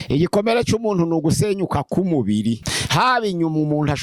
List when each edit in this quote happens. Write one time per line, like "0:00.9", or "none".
0:02.7